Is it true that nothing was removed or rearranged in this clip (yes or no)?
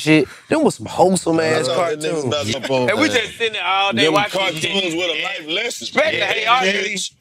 no